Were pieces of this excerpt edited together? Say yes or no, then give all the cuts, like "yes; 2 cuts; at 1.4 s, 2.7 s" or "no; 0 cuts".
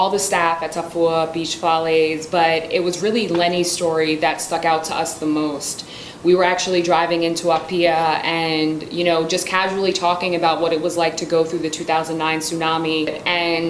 yes; 1 cut; at 12.7 s